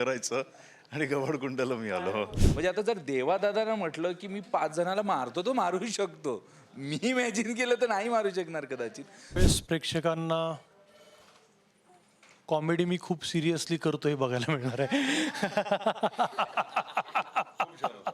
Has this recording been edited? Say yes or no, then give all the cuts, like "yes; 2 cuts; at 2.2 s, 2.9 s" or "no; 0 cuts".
yes; 2 cuts; at 2.4 s, 9.4 s